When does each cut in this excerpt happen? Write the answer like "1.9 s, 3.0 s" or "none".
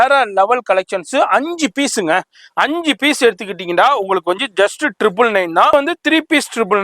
5.7 s